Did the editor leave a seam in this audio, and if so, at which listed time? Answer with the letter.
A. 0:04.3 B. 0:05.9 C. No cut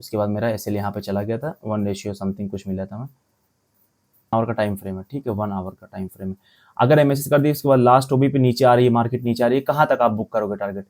A